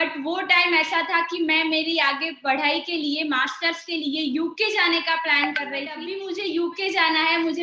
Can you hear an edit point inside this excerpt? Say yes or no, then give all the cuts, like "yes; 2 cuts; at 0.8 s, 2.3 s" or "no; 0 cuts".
yes; 1 cut; at 6.1 s